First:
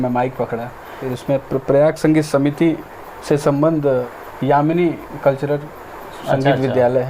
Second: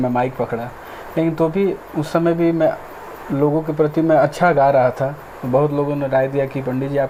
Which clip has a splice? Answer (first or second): first